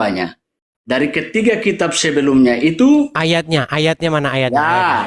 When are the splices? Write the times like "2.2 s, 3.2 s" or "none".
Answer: 3.3 s